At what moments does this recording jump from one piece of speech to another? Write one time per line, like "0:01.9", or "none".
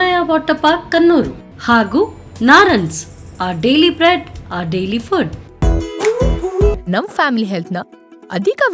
0:05.4